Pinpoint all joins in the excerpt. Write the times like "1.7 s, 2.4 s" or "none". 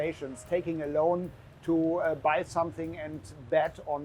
none